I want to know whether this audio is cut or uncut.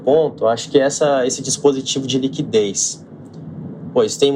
uncut